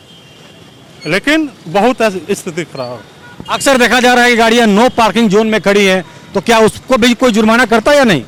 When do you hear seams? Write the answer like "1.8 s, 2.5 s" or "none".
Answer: none